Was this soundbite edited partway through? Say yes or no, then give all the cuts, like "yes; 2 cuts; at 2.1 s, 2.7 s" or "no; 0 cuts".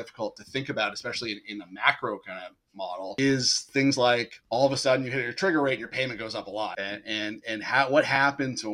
yes; 3 cuts; at 3.1 s, 4.4 s, 6.8 s